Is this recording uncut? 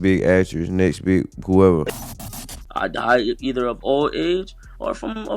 no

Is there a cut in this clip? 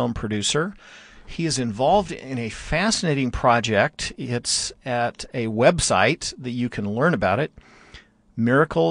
no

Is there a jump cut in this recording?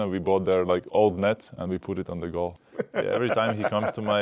yes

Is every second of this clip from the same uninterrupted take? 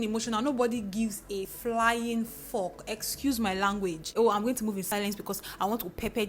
no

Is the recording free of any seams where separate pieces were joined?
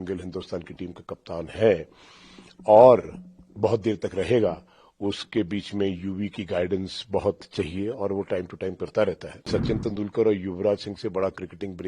no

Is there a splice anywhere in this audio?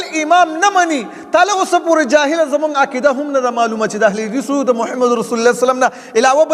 no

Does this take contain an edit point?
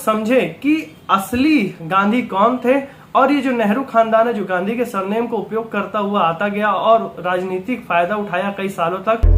no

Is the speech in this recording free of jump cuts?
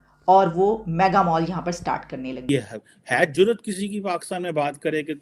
no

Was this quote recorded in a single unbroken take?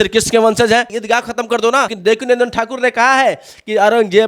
no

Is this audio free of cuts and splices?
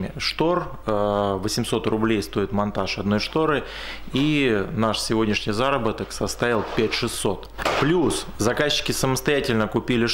no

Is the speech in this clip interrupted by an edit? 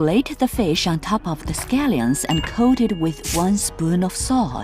no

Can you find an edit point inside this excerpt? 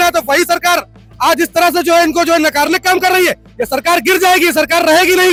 no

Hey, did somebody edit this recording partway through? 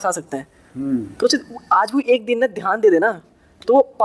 no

